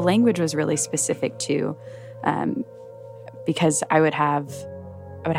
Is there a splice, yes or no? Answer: no